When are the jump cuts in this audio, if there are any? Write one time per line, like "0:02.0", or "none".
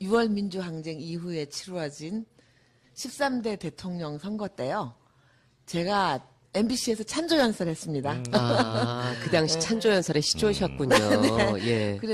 none